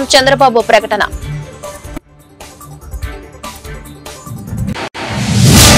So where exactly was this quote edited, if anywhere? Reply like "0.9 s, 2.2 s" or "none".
1.1 s, 4.7 s

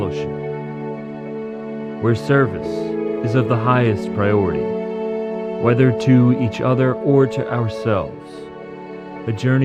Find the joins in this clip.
none

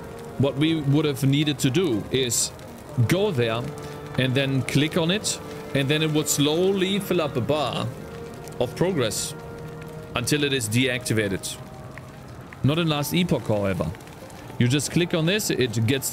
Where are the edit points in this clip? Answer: none

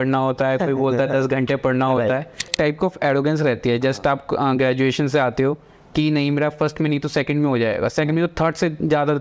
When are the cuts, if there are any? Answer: 2.5 s

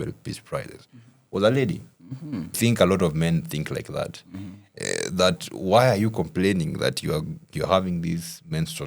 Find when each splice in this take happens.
2.6 s

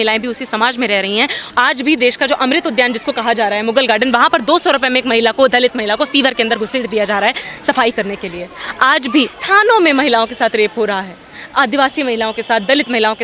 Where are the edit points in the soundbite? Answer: 1.4 s, 9.4 s

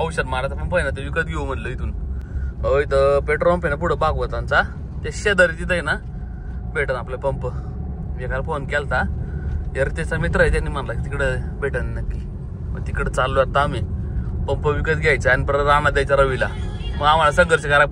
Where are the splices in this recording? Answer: none

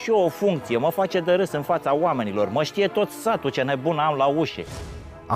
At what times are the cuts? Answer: none

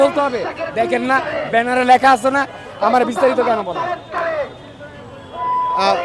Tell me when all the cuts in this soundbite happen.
none

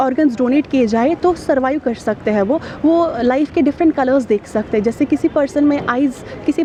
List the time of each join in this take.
none

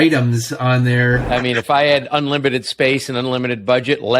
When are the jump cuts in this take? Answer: 1.2 s

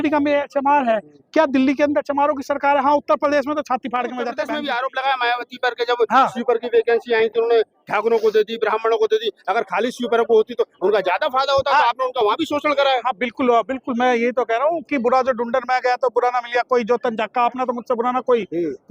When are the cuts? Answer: 4.4 s

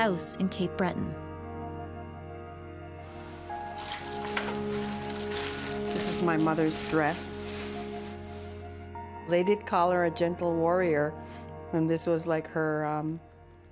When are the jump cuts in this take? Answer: 3.4 s

